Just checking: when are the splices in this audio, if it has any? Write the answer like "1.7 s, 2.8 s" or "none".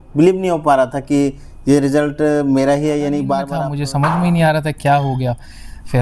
3.6 s